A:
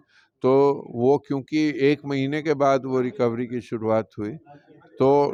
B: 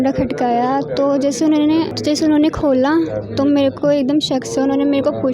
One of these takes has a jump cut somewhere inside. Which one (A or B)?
B